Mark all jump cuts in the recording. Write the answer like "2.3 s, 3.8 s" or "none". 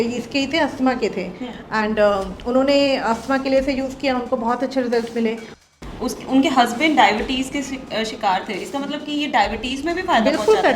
5.5 s

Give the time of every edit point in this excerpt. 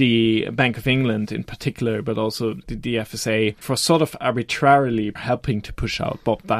3.6 s, 5.2 s

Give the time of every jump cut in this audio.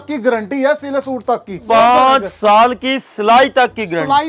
1.6 s

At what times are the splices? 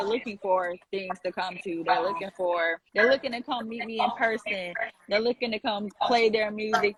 none

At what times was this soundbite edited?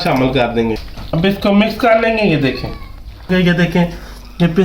0.9 s, 3.3 s

